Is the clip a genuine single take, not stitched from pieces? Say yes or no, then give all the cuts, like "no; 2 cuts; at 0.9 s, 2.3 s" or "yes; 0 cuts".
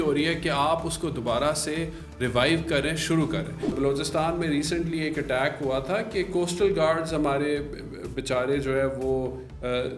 no; 1 cut; at 3.7 s